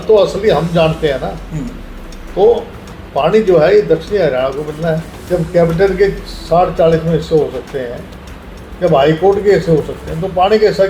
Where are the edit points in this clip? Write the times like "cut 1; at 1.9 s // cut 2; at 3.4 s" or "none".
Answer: cut 1; at 5.1 s